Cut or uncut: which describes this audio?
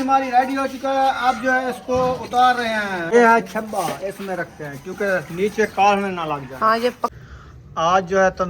cut